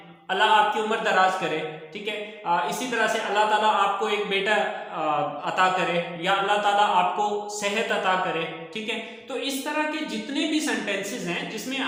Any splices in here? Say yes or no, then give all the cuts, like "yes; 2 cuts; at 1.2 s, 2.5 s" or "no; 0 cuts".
no; 0 cuts